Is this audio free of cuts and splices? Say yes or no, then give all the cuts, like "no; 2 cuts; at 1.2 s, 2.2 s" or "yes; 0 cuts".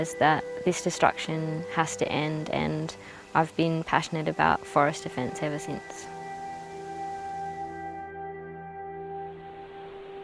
no; 1 cut; at 4.4 s